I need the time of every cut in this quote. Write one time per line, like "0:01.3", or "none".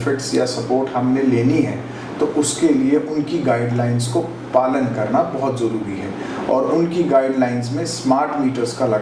none